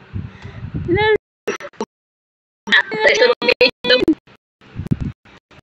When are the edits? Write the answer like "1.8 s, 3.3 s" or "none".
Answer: 1.2 s